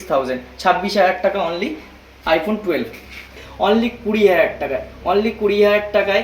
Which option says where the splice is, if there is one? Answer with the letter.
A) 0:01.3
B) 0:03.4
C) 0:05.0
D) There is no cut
B